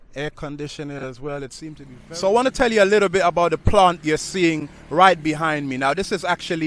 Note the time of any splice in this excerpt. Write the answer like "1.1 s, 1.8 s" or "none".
1.9 s